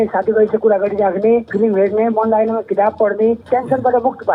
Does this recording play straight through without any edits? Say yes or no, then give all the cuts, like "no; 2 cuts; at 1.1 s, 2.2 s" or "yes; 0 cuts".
no; 2 cuts; at 1.5 s, 3.4 s